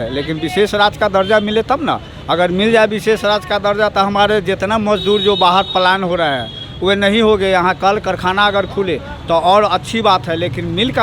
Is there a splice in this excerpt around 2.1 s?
no; 0 cuts

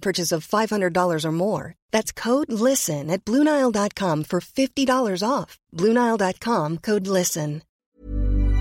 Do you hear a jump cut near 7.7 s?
yes; 1 cut; at 7.7 s

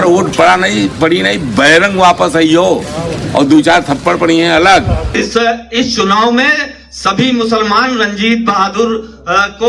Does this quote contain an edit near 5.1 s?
yes; 1 cut; at 5.1 s

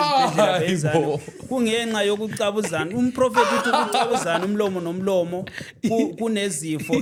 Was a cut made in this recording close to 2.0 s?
no; 0 cuts

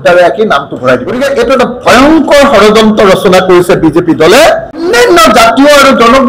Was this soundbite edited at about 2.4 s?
no; 2 cuts; at 1.2 s, 4.8 s

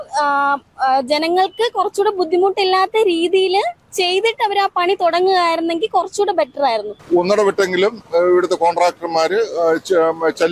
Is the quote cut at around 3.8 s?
no; 1 cut; at 6.9 s

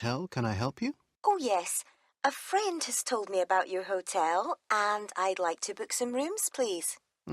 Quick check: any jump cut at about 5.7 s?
no; 1 cut; at 1.1 s

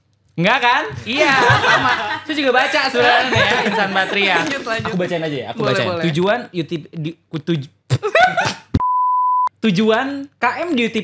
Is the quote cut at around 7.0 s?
no; 1 cut; at 4.8 s

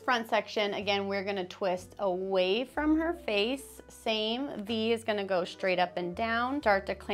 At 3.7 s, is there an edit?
no; 0 cuts

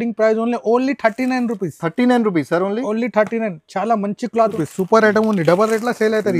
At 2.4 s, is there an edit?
no; 1 cut; at 4.6 s

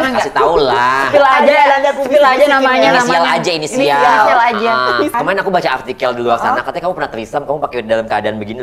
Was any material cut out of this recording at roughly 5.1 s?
yes; 1 cut; at 5.1 s

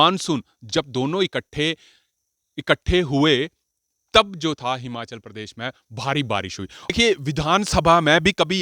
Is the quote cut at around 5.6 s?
no; 1 cut; at 6.9 s

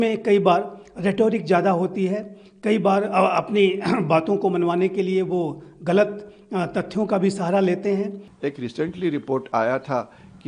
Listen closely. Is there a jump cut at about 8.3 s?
yes; 1 cut; at 8.3 s

